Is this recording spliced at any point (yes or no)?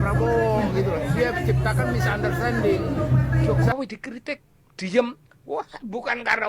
yes